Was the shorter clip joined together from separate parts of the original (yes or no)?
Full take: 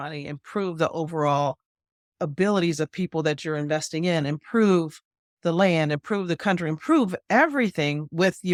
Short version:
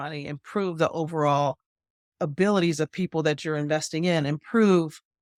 no